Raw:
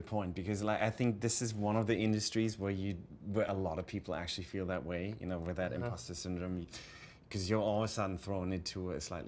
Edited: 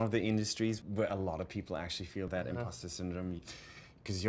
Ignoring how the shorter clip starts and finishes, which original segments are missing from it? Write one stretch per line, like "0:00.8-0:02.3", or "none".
0:02.6-0:03.2
0:04.7-0:05.5